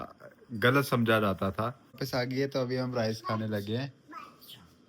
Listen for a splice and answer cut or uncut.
cut